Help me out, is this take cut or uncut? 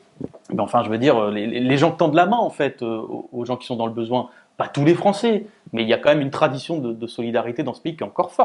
uncut